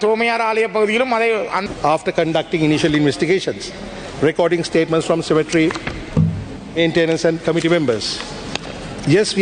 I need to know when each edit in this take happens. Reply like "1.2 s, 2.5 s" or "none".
1.6 s